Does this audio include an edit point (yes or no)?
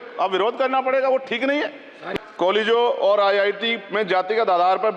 yes